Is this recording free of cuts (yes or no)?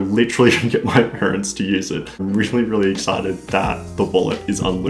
no